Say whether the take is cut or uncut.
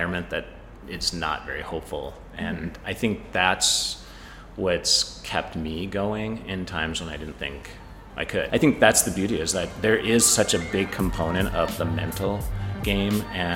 cut